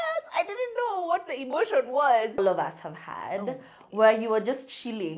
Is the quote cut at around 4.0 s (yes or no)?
no